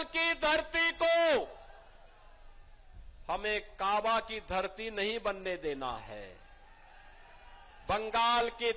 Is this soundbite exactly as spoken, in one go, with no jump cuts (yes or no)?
yes